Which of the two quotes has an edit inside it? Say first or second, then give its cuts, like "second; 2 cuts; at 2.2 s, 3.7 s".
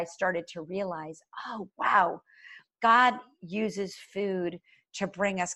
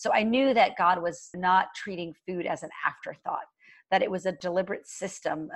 second; 2 cuts; at 1.3 s, 4.4 s